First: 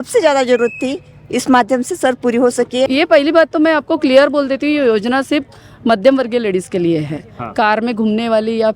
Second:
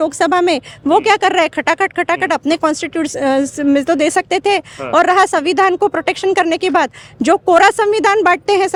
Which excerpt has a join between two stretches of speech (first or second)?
first